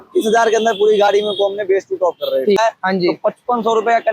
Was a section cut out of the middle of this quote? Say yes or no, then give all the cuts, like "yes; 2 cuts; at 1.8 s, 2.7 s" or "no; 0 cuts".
yes; 1 cut; at 2.6 s